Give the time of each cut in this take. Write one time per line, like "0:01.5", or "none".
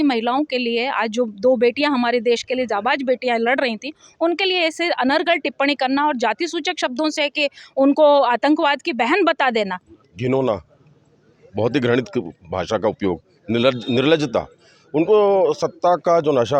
0:09.9

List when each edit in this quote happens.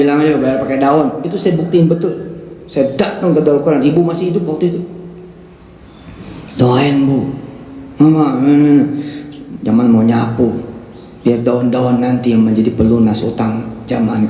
none

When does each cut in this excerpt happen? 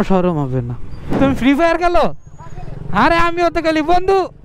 0:01.1

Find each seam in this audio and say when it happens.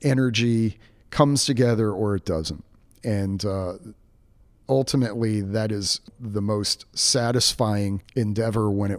0:08.0

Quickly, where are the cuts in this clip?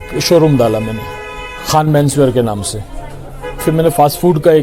0:03.6

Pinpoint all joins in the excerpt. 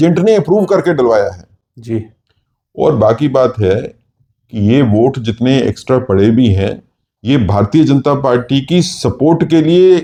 none

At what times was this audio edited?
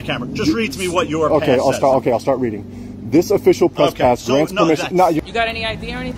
0:05.2

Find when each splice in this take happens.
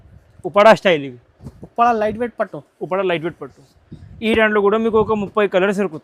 none

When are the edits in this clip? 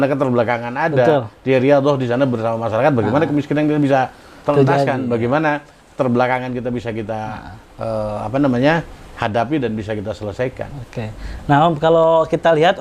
none

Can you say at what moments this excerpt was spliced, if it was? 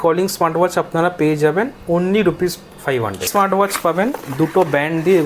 0:03.3

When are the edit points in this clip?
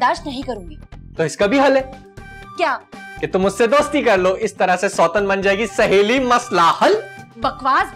none

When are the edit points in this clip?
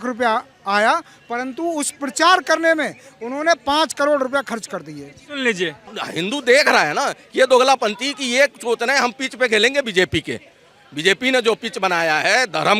0:06.0

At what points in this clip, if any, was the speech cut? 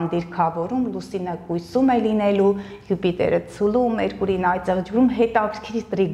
none

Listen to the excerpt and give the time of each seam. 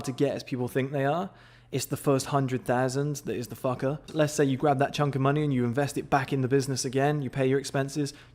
0:04.0

